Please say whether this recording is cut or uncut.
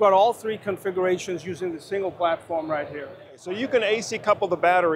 cut